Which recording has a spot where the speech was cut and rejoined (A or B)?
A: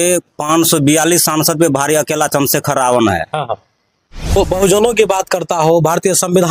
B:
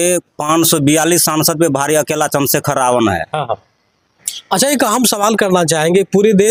A